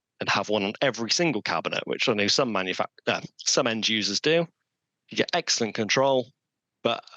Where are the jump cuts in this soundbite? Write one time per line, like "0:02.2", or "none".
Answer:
none